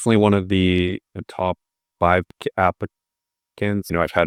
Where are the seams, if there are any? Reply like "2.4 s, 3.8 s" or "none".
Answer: none